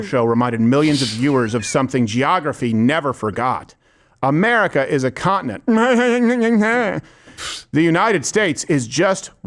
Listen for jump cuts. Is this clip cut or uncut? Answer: uncut